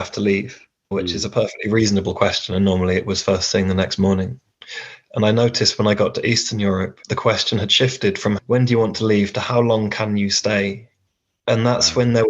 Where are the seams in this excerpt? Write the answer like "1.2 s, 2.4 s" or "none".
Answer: 0.9 s, 7.0 s